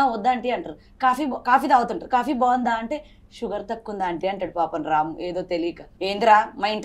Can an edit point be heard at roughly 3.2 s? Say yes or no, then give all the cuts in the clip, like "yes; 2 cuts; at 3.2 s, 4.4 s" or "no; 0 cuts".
no; 1 cut; at 5.9 s